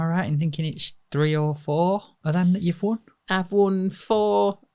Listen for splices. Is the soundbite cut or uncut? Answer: uncut